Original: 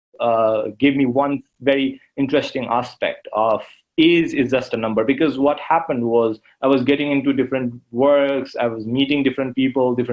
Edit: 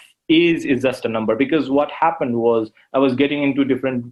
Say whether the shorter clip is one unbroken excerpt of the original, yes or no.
yes